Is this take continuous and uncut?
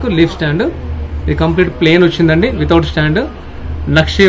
yes; 0 cuts

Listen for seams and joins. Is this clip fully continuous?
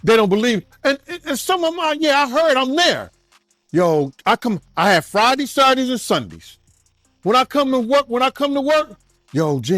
yes; 0 cuts

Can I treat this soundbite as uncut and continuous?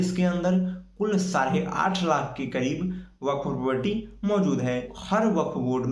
no; 1 cut; at 4.9 s

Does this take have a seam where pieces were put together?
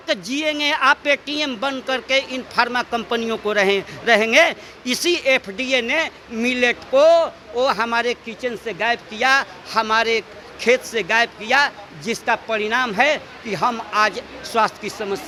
no; 0 cuts

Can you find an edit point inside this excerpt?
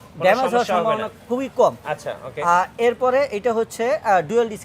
no; 0 cuts

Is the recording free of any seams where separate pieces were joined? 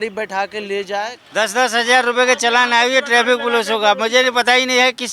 no; 1 cut; at 1.2 s

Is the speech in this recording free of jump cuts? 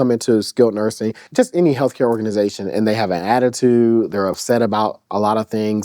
no; 1 cut; at 1.1 s

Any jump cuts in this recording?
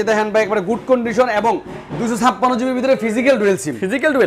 no; 0 cuts

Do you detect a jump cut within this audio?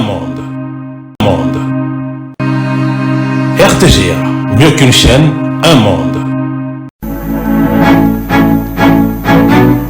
yes; 1 cut; at 1.1 s

